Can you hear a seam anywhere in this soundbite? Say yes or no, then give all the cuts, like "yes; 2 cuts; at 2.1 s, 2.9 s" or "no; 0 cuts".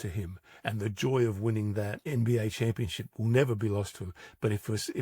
yes; 1 cut; at 2.0 s